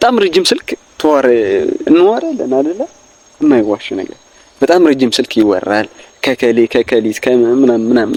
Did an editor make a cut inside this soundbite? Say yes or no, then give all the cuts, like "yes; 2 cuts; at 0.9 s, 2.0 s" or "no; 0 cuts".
no; 0 cuts